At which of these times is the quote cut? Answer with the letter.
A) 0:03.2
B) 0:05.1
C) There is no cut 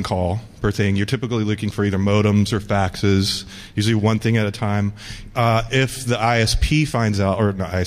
C